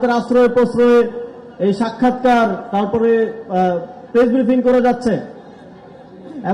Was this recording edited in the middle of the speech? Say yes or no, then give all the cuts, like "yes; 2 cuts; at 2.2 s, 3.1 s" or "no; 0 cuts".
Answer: no; 0 cuts